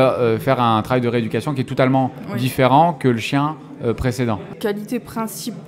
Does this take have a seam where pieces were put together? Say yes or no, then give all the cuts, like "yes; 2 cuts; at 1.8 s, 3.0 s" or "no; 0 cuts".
yes; 1 cut; at 4.5 s